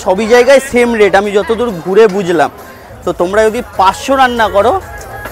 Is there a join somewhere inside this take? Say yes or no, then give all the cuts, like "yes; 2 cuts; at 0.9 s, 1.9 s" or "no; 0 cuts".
no; 0 cuts